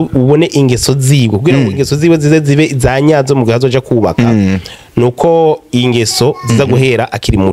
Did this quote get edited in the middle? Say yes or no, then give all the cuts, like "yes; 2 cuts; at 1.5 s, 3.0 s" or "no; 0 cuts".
no; 0 cuts